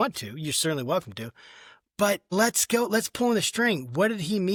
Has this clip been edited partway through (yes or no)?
no